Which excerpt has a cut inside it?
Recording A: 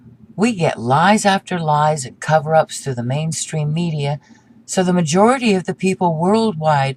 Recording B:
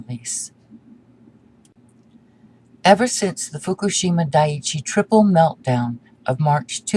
A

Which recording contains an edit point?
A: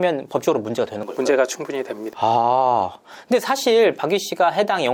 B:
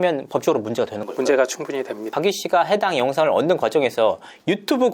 B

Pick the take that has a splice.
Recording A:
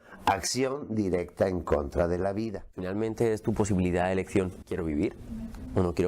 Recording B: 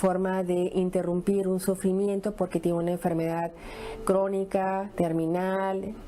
A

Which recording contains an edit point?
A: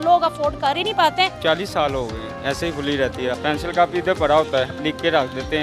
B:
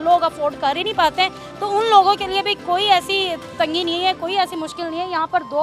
A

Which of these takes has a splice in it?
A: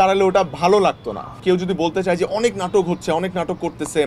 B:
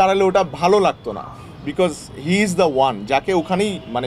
A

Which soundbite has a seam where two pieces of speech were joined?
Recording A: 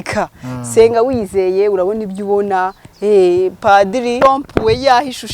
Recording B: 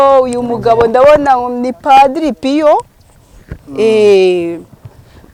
A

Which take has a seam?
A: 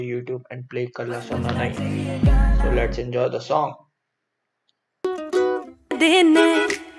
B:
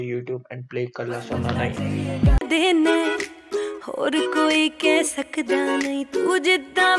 B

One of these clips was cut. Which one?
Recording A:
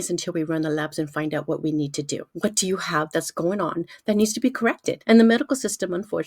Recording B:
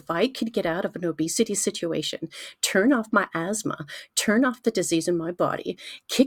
A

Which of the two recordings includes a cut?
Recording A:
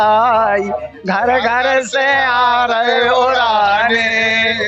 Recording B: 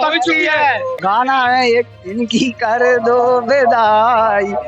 B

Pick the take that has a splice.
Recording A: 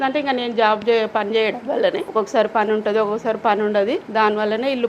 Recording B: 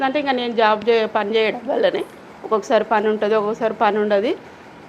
A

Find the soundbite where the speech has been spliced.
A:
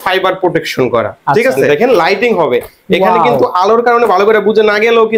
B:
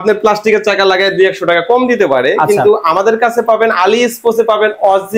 A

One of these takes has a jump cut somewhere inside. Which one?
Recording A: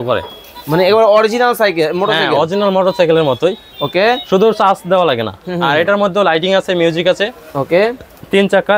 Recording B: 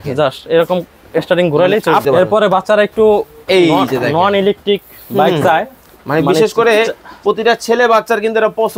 B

